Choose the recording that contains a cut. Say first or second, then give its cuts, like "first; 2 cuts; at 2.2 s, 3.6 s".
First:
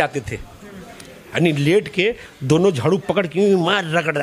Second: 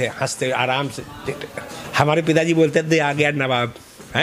second; 1 cut; at 1.8 s